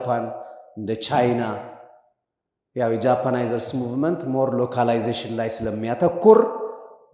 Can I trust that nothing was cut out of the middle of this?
yes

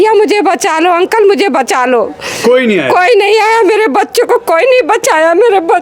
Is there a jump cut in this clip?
no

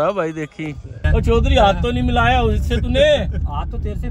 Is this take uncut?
no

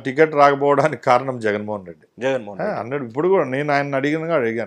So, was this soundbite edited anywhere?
no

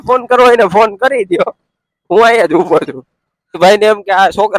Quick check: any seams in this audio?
yes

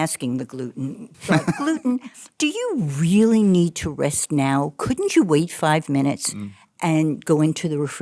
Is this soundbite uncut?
no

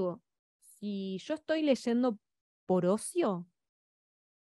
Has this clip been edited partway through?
no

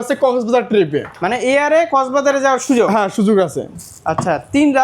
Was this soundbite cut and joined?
no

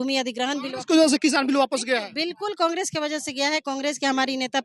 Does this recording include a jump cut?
no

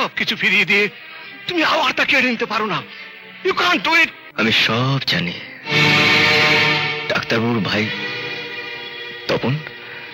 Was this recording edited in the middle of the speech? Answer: yes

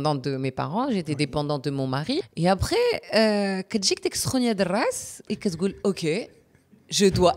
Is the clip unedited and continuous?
no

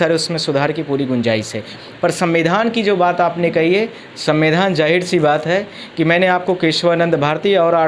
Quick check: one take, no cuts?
yes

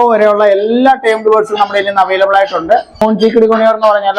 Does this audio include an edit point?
yes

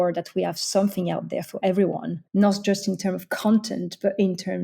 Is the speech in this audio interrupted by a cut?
yes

